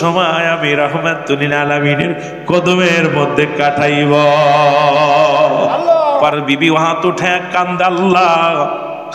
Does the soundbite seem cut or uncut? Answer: cut